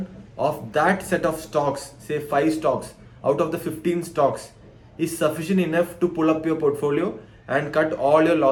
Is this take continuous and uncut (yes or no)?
yes